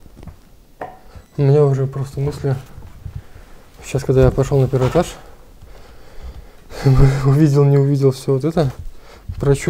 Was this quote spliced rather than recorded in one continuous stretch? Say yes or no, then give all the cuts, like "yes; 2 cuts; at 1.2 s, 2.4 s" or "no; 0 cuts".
no; 0 cuts